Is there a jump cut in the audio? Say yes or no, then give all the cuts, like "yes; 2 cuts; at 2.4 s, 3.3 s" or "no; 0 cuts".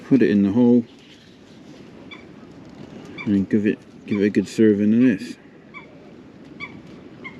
no; 0 cuts